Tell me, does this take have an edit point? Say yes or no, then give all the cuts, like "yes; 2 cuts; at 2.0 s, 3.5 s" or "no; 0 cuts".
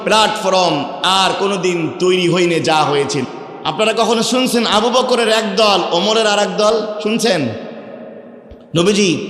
yes; 1 cut; at 3.3 s